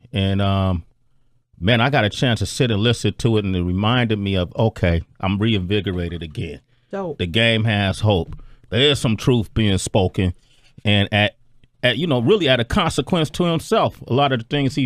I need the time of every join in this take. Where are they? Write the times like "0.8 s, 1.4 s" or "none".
8.2 s